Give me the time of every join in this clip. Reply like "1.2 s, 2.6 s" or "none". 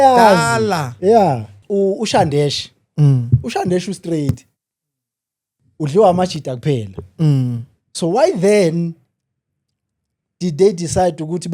1.5 s